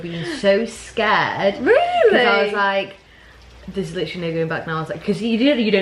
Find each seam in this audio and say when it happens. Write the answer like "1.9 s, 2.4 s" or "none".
none